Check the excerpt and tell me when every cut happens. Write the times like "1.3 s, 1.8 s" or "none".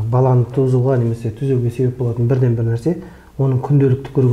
none